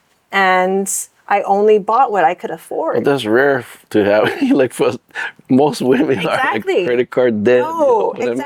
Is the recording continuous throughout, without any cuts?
yes; 0 cuts

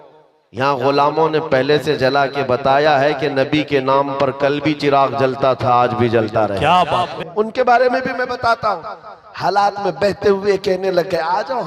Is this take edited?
yes; 1 cut; at 7.1 s

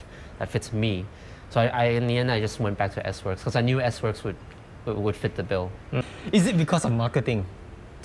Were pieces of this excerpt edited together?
yes; 1 cut; at 6.0 s

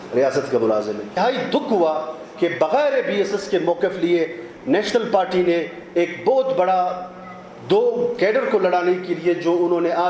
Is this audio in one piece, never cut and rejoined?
no; 1 cut; at 1.2 s

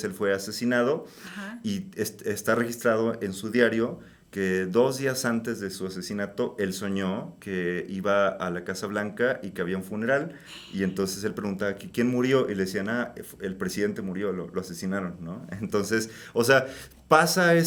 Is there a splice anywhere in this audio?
no; 0 cuts

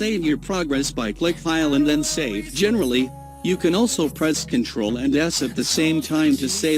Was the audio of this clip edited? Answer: yes; 1 cut; at 2.5 s

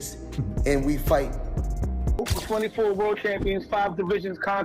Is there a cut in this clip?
yes; 1 cut; at 2.3 s

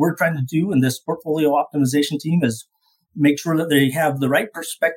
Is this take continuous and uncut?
yes; 0 cuts

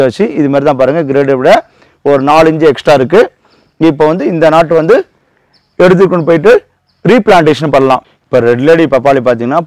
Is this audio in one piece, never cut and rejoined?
no; 1 cut; at 8.1 s

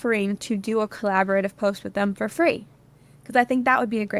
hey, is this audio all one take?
yes; 0 cuts

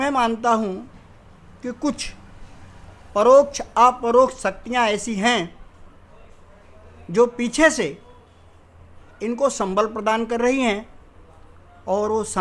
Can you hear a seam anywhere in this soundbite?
no; 0 cuts

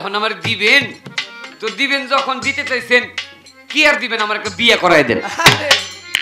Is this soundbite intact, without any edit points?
yes; 0 cuts

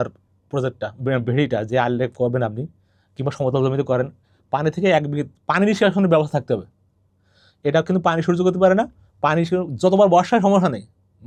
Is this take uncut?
yes; 0 cuts

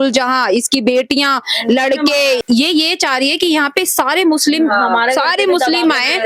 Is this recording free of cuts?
no; 1 cut; at 2.4 s

